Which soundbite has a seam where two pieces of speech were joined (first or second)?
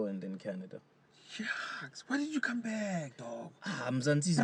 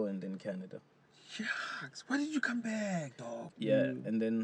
second